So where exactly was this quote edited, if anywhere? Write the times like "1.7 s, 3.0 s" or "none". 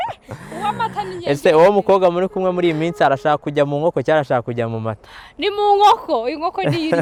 none